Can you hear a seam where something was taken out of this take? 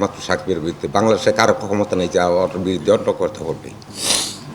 no; 0 cuts

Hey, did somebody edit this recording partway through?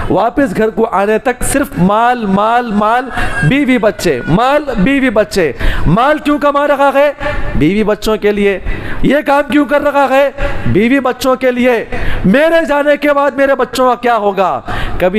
no; 0 cuts

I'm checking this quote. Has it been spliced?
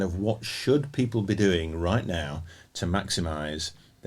no; 0 cuts

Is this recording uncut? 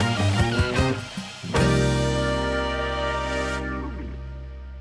yes; 0 cuts

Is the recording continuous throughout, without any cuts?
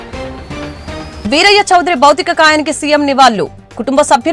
no; 1 cut; at 1.1 s

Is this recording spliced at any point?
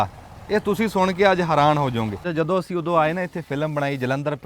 yes; 1 cut; at 2.2 s

